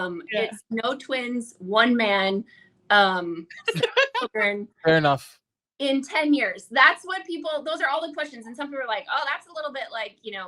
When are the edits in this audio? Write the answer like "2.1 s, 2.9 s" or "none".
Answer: none